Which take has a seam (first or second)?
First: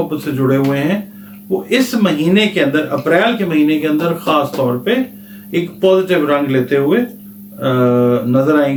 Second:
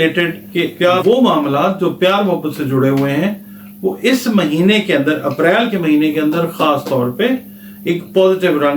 second